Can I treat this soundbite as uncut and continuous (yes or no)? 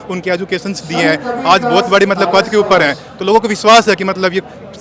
yes